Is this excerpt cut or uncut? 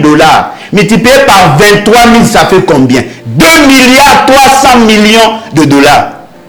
uncut